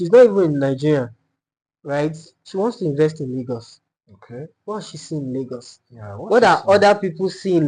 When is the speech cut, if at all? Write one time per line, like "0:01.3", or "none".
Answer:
none